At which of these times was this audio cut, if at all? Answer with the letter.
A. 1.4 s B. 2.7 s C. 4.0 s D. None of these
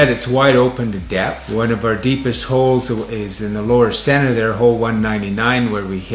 A